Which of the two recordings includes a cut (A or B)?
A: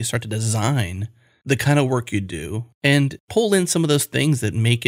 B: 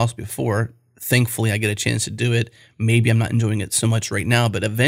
A